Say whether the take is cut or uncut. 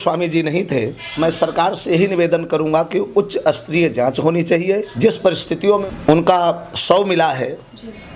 cut